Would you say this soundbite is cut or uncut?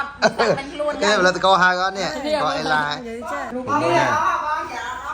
cut